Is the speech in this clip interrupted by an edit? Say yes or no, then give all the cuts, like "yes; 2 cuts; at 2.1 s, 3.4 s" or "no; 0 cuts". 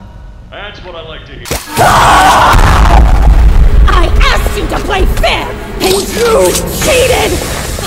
yes; 1 cut; at 1.4 s